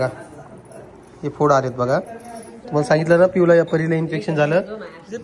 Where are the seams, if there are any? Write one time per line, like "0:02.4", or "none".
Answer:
none